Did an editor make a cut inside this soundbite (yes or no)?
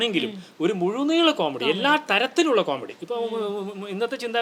no